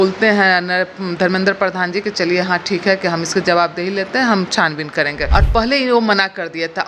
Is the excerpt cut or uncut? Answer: cut